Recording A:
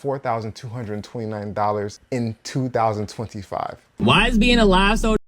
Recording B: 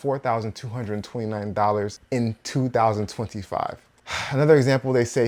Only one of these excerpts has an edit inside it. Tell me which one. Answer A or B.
A